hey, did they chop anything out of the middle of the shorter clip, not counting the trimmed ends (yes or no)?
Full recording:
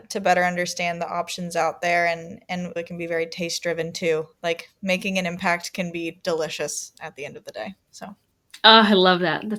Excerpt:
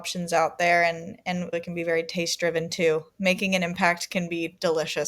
yes